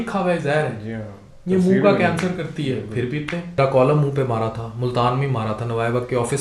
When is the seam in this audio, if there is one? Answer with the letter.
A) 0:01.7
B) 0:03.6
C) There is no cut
B